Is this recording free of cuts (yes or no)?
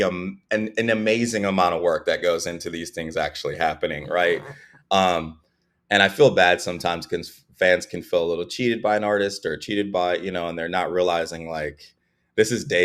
yes